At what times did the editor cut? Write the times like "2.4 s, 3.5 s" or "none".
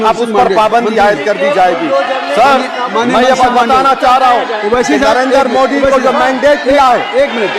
none